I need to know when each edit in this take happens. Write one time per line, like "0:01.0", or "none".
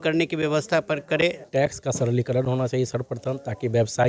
0:01.4